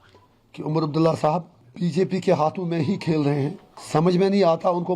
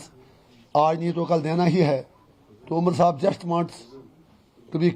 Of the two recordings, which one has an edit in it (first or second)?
first